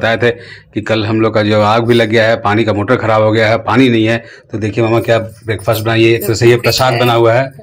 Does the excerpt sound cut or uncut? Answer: uncut